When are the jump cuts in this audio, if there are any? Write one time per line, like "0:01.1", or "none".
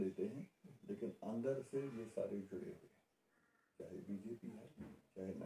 none